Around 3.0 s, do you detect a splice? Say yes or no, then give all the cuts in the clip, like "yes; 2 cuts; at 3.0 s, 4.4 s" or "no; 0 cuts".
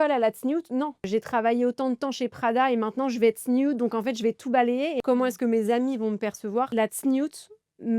no; 3 cuts; at 1.0 s, 5.0 s, 6.7 s